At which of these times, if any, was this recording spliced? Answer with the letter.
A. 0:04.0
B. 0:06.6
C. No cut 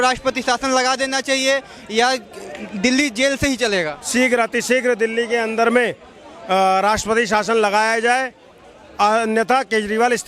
A